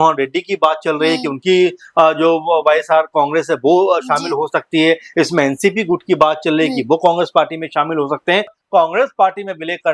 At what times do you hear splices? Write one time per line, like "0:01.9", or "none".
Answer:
0:08.6